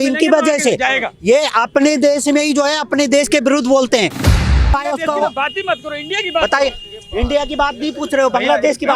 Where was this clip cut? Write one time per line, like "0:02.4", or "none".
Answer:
0:04.5